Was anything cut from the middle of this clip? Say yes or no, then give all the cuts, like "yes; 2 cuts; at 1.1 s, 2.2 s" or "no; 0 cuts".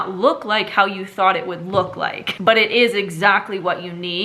yes; 1 cut; at 2.4 s